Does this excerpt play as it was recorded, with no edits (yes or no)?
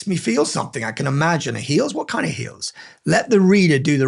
yes